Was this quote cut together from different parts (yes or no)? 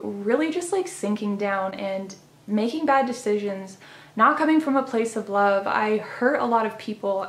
no